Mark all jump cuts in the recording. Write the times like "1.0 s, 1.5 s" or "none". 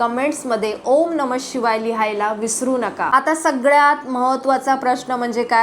3.0 s